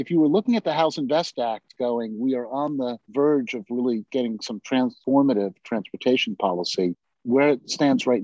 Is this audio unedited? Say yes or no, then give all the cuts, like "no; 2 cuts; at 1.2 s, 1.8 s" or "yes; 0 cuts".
no; 1 cut; at 7.1 s